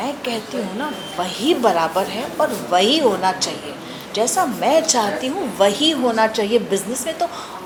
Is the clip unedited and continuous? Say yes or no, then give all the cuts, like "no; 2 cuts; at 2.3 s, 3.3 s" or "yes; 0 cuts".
yes; 0 cuts